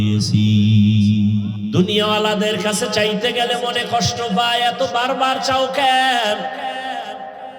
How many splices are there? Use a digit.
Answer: 1